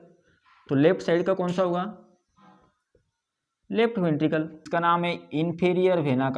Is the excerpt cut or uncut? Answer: cut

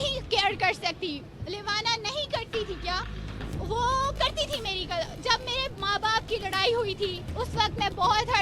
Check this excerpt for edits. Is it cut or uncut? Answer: cut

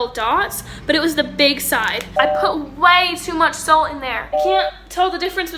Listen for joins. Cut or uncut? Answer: cut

